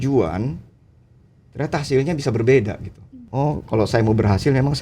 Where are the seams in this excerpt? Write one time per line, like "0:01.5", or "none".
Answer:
0:03.2